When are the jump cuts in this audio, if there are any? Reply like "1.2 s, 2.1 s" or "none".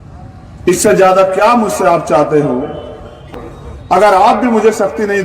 3.3 s